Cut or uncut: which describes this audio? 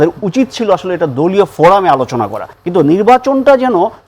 cut